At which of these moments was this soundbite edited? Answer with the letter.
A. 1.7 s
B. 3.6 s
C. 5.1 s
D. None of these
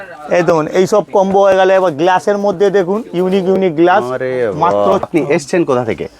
C